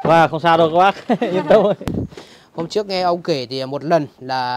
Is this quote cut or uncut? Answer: cut